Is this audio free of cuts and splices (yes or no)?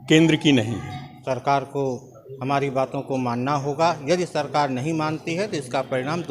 no